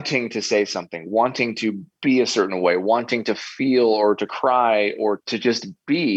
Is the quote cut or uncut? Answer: cut